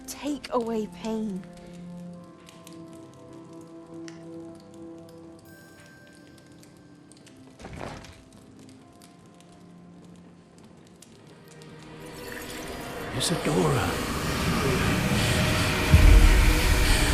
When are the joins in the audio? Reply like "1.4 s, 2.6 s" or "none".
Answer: none